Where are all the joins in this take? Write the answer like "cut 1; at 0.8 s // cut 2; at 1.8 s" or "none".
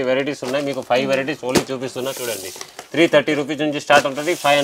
none